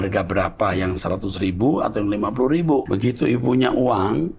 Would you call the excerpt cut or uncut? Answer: cut